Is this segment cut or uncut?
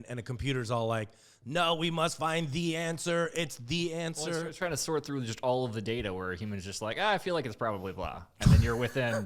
uncut